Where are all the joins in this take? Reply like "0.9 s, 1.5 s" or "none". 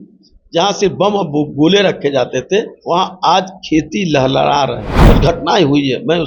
2.8 s, 5.0 s

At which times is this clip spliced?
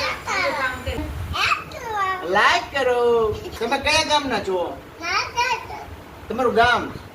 1.0 s, 3.6 s

